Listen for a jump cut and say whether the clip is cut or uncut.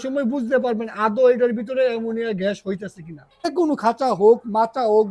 cut